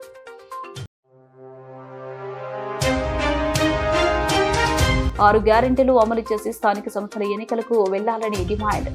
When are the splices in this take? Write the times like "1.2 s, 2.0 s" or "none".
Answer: 5.0 s